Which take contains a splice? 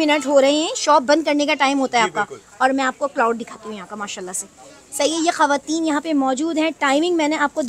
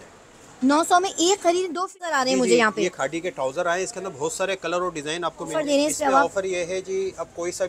second; 2 cuts; at 1.9 s, 5.5 s

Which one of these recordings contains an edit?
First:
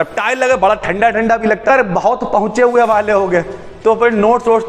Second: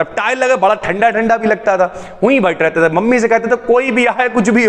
first; 1 cut; at 1.7 s

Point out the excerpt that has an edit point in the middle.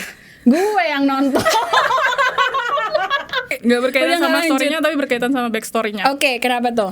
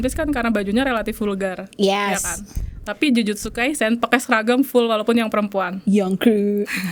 first; 1 cut; at 3.5 s

